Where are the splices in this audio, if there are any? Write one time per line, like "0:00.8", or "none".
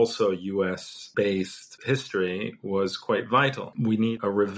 0:00.9
0:01.7
0:03.7